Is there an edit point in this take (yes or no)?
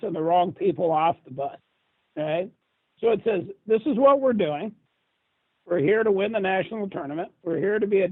no